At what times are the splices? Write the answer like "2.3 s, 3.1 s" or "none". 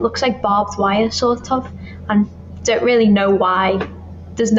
none